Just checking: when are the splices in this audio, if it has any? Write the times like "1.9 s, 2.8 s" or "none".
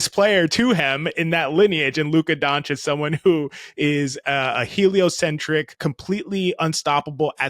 5.7 s